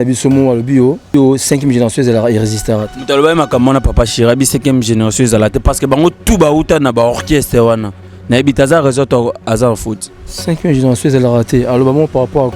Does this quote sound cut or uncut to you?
cut